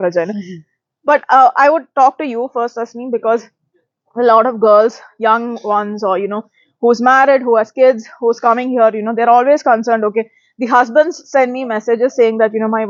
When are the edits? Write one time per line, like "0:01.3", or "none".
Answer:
none